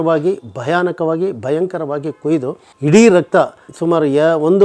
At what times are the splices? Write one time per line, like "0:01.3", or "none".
none